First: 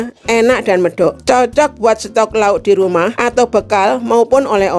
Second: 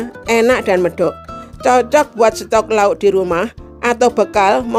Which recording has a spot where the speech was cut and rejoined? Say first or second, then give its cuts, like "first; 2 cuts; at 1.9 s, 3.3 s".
first; 2 cuts; at 1.2 s, 3.2 s